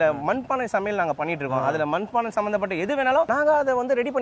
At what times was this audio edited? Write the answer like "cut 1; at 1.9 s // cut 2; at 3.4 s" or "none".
cut 1; at 3.3 s